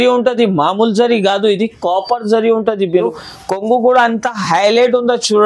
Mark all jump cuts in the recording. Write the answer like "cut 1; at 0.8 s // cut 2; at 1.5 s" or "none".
cut 1; at 3.2 s